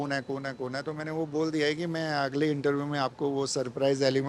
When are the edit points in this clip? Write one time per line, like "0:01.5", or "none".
none